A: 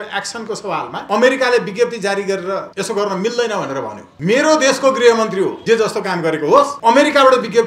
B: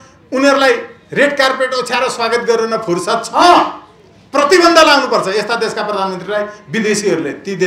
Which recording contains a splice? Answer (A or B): A